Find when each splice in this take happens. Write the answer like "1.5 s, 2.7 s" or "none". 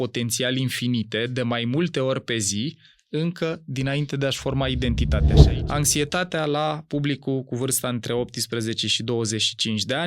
5.4 s